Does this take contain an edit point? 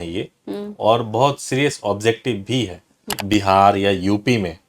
yes; 1 cut; at 3.1 s

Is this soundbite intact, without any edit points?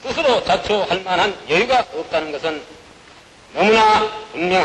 yes; 0 cuts

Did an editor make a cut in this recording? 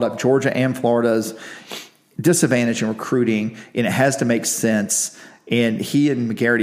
no; 0 cuts

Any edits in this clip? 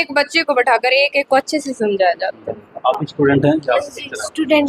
no; 0 cuts

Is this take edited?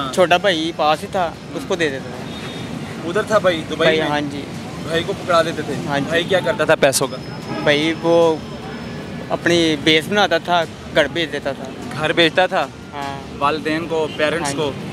no; 0 cuts

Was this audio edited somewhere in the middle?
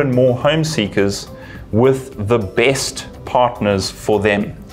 no; 0 cuts

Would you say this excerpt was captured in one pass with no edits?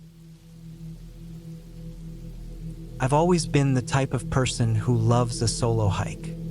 no; 1 cut; at 3.0 s

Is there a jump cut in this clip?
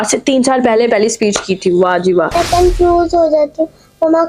yes; 1 cut; at 2.3 s

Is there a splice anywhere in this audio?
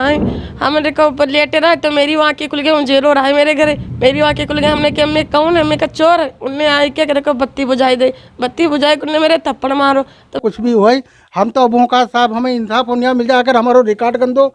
yes; 1 cut; at 10.4 s

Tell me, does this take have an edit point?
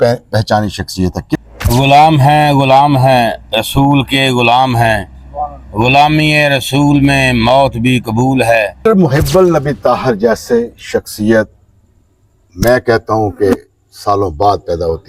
yes; 2 cuts; at 1.4 s, 8.8 s

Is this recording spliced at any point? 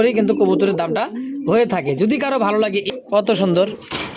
yes; 1 cut; at 2.9 s

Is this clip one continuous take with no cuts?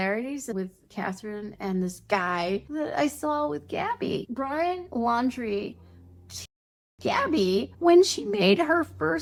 yes; 0 cuts

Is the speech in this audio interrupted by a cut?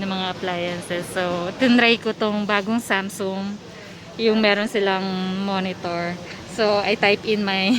no; 0 cuts

